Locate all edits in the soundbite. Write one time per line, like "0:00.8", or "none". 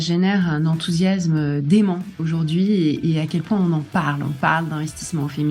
0:02.1